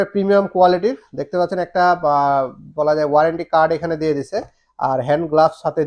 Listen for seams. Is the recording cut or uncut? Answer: uncut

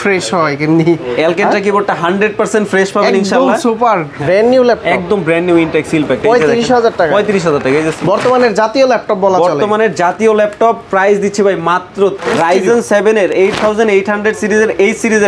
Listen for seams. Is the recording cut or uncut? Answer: cut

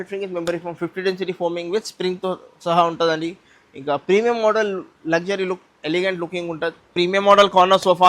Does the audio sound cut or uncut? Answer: cut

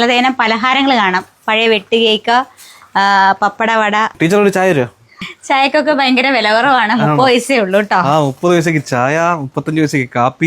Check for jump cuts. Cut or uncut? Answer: cut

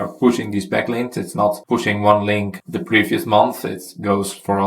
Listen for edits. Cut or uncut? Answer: uncut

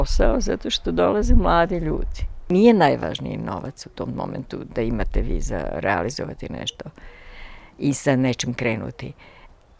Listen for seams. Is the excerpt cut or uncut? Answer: cut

